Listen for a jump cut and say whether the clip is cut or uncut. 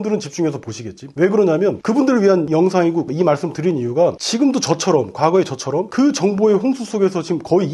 cut